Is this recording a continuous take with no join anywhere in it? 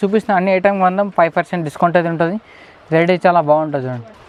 yes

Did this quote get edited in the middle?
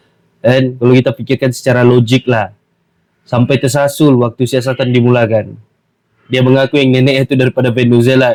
no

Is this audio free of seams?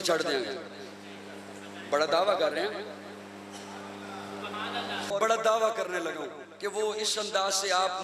no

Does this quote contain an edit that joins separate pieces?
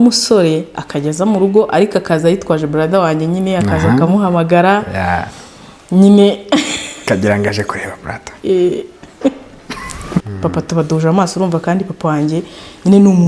yes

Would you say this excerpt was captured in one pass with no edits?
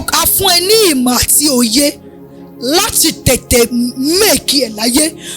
yes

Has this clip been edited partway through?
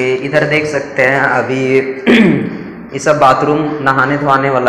no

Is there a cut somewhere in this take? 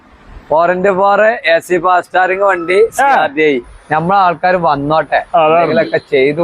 yes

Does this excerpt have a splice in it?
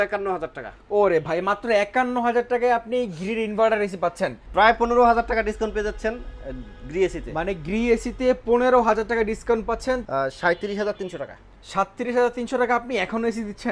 yes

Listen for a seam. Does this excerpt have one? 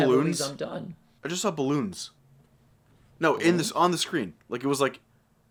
no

